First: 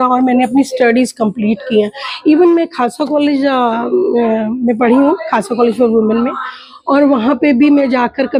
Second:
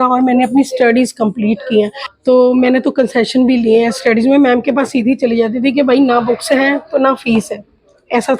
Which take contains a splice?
second; 1 cut; at 2.0 s

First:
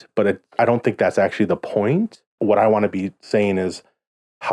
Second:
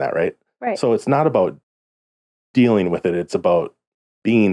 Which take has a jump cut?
first; 1 cut; at 2.3 s

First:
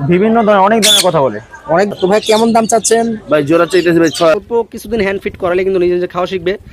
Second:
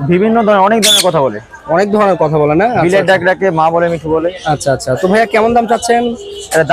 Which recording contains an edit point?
first; 2 cuts; at 1.9 s, 4.3 s

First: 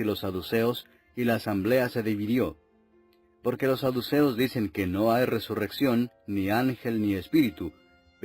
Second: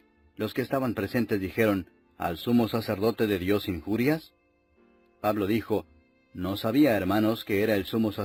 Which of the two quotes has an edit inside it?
first; 1 cut; at 1.9 s

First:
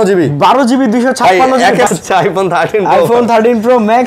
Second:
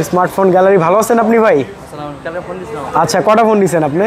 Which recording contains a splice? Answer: first; 1 cut; at 1.9 s

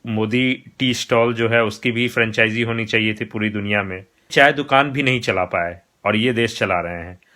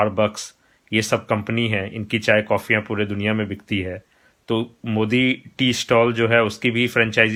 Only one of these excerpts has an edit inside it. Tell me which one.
first; 1 cut; at 4.3 s

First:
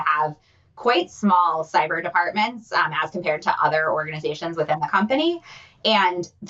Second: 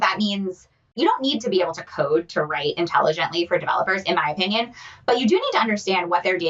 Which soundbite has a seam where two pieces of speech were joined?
second; 1 cut; at 0.9 s

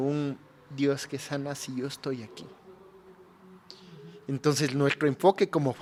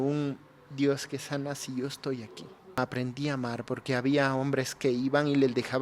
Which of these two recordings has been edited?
second; 1 cut; at 2.8 s

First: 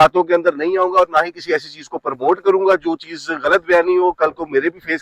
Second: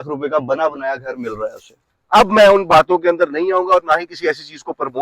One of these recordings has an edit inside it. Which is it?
second; 1 cut; at 1.8 s

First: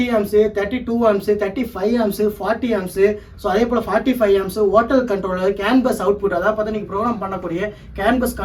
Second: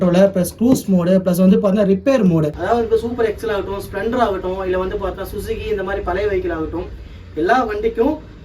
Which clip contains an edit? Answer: second; 1 cut; at 2.6 s

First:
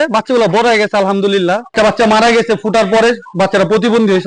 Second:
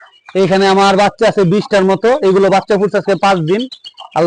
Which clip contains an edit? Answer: first; 1 cut; at 1.7 s

